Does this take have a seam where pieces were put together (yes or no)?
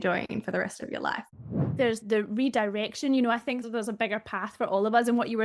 yes